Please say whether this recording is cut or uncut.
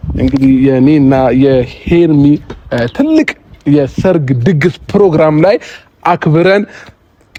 uncut